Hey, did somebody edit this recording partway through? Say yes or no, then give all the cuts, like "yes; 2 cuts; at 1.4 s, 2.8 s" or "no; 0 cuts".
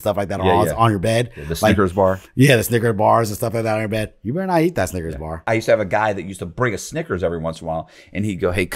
yes; 1 cut; at 5.4 s